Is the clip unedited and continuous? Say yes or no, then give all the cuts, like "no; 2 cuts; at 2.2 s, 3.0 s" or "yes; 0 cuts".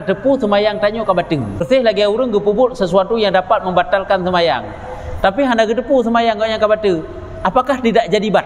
no; 1 cut; at 1.6 s